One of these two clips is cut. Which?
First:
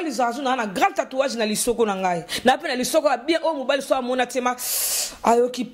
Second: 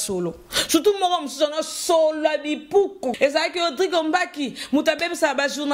second; 1 cut; at 3.1 s

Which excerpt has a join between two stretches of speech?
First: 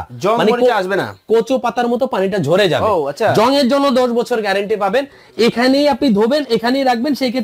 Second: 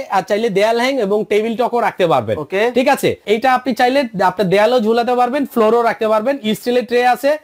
second; 1 cut; at 3.2 s

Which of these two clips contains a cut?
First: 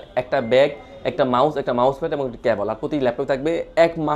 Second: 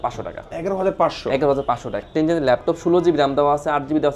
second; 1 cut; at 2.0 s

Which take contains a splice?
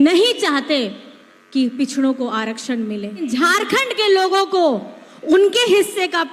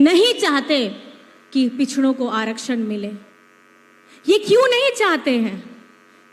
first; 1 cut; at 3.3 s

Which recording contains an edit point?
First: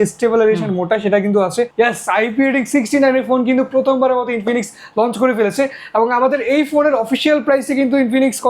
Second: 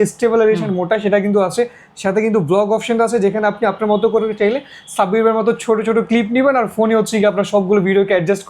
first; 1 cut; at 1.7 s

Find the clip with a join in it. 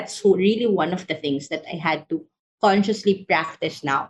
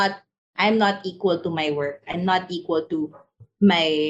second; 1 cut; at 2.0 s

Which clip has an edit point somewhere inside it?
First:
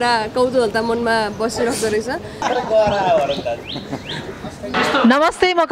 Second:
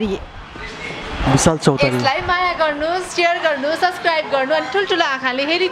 first; 2 cuts; at 2.4 s, 4.7 s

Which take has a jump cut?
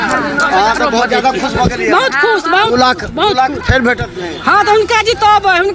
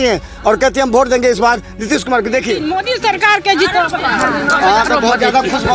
second; 1 cut; at 2.8 s

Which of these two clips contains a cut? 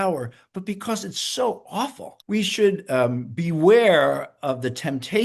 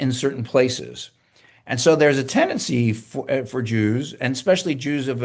first; 1 cut; at 2.1 s

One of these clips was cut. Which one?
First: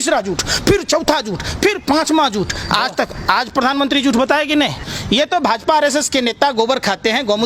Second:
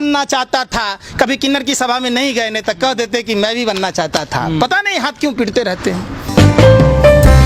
first; 1 cut; at 4.8 s

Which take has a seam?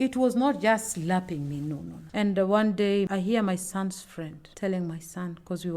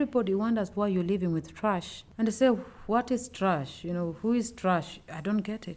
first; 1 cut; at 2.0 s

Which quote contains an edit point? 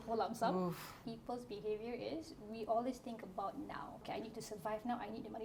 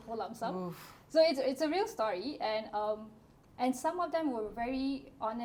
first; 2 cuts; at 1.0 s, 4.0 s

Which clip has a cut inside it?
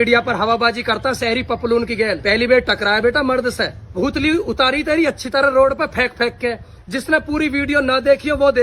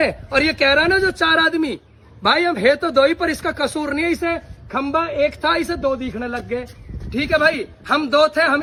first; 1 cut; at 3.9 s

